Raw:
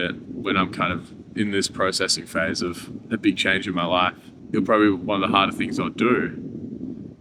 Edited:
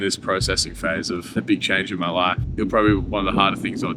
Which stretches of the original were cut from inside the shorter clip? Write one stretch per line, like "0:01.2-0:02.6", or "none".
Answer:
0:02.8-0:03.0
0:04.2-0:04.4